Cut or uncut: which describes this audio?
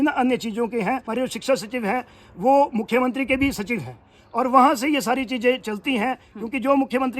cut